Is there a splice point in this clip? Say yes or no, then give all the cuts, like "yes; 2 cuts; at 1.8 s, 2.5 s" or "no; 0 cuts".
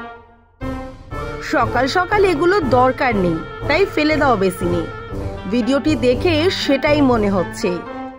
yes; 1 cut; at 1.5 s